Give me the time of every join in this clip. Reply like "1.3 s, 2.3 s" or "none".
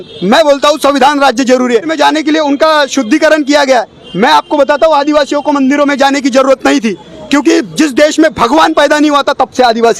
1.9 s